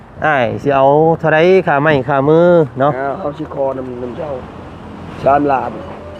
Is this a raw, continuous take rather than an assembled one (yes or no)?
yes